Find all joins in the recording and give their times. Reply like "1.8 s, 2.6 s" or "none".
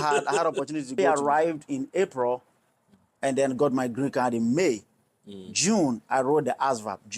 1.0 s